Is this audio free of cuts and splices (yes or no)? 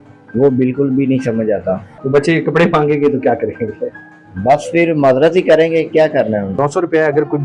no